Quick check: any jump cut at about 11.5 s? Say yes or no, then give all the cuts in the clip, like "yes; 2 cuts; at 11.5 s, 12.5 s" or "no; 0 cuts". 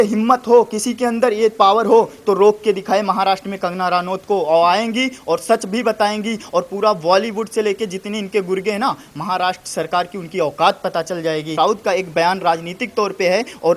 yes; 1 cut; at 11.5 s